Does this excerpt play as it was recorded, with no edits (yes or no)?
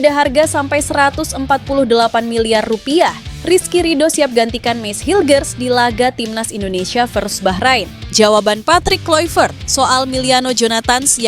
no